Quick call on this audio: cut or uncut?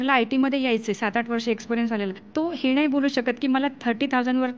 cut